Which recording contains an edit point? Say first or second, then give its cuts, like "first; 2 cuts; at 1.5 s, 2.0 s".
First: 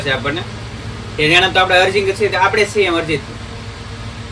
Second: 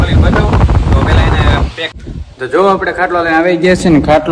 second; 1 cut; at 1.9 s